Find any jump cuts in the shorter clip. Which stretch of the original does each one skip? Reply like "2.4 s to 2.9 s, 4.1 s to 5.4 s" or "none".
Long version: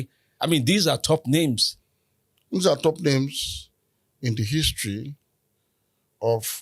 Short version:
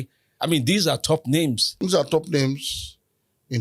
1.7 s to 2.4 s